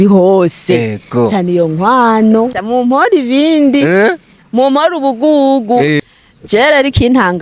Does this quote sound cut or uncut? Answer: cut